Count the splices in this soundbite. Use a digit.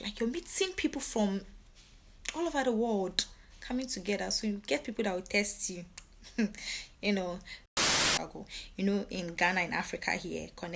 1